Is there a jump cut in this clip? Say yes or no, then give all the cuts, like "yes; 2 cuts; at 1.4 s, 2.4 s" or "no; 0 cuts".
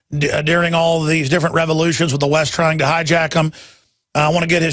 yes; 1 cut; at 1.1 s